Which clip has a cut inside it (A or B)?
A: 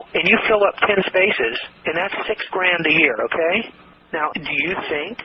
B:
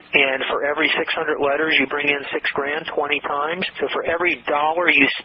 A